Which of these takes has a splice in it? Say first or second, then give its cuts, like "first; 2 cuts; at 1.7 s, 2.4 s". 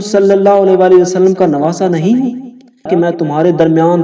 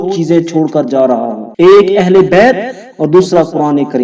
first; 1 cut; at 2.9 s